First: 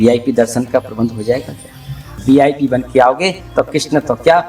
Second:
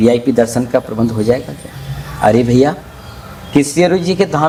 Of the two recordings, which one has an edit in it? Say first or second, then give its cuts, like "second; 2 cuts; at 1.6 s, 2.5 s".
first; 1 cut; at 2.2 s